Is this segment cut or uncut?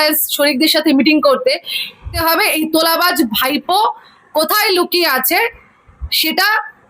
cut